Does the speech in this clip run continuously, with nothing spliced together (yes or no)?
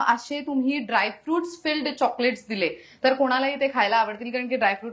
yes